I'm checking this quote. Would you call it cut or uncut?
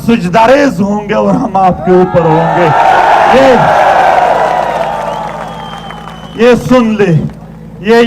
uncut